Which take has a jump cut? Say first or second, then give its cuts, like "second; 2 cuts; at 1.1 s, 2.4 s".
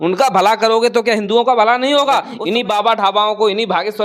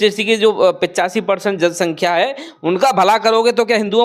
first; 1 cut; at 2.3 s